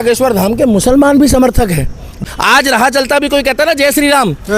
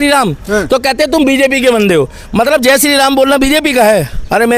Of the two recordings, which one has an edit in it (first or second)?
first